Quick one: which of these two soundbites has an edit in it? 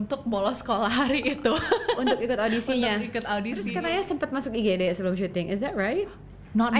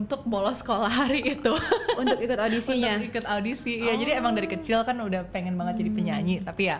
first; 1 cut; at 3.7 s

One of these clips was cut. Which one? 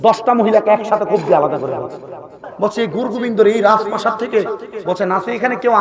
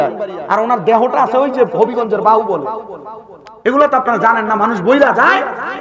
first; 1 cut; at 2.6 s

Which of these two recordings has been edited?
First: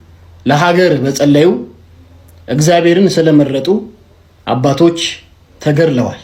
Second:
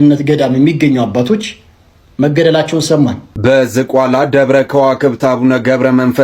second; 1 cut; at 3.3 s

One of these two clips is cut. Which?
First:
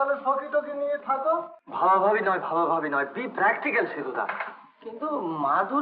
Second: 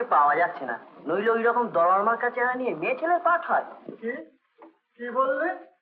first; 1 cut; at 1.6 s

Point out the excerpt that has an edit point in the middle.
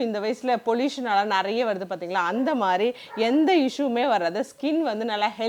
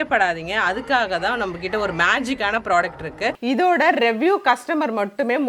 second; 1 cut; at 3.4 s

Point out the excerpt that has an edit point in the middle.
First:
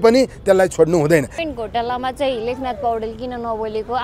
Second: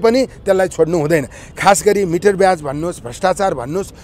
first; 1 cut; at 1.4 s

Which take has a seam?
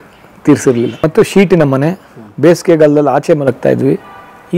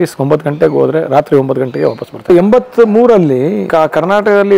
second; 2 cuts; at 2.3 s, 3.7 s

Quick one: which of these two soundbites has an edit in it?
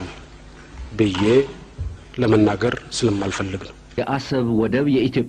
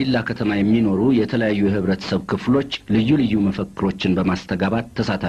first; 1 cut; at 4.0 s

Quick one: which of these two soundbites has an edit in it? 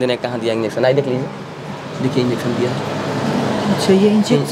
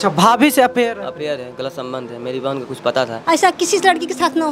second; 1 cut; at 3.2 s

